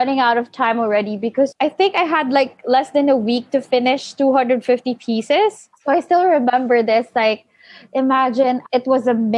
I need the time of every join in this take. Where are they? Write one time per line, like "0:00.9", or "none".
0:01.5
0:05.7
0:08.6